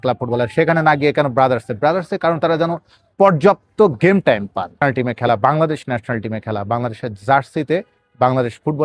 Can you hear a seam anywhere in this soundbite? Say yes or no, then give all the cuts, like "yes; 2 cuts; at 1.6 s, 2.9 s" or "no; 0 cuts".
yes; 1 cut; at 4.8 s